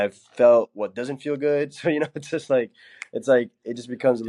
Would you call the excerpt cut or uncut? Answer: uncut